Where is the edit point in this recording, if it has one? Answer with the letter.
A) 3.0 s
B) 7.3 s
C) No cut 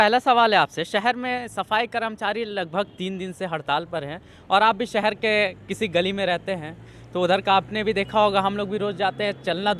C